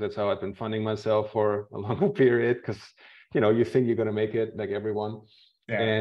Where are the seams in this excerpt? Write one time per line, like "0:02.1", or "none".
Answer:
none